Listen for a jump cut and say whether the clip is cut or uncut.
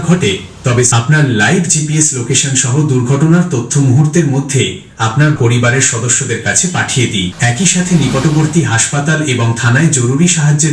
cut